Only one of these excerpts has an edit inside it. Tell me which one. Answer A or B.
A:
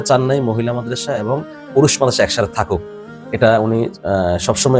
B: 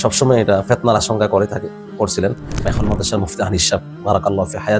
B